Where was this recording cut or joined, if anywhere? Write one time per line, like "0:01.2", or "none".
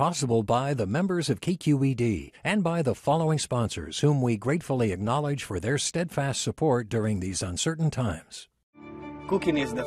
none